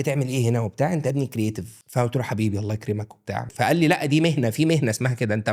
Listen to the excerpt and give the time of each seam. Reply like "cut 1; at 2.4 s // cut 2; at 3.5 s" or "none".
cut 1; at 1.7 s // cut 2; at 3.5 s